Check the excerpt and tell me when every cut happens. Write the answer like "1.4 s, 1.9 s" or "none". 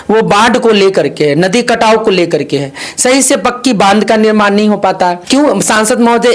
5.2 s